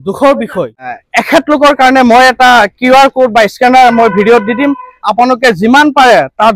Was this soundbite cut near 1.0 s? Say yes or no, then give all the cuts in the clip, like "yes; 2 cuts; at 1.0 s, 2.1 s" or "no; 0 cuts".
yes; 1 cut; at 1.0 s